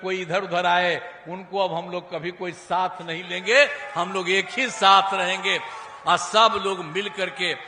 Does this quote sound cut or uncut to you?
uncut